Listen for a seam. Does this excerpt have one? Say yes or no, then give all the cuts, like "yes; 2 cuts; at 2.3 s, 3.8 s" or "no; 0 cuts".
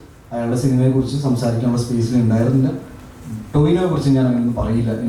no; 0 cuts